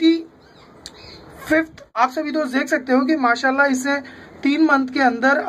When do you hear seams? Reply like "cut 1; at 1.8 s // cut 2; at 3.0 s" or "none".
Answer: cut 1; at 2.0 s